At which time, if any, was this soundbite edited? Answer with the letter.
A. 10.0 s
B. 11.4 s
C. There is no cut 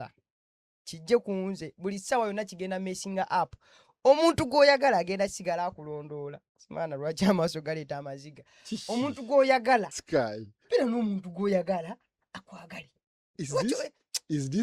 A